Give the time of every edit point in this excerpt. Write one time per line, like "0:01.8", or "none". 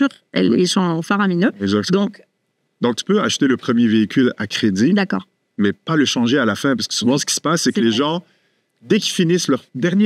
none